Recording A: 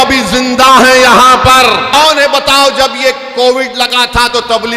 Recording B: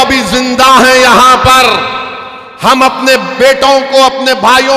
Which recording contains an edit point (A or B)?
A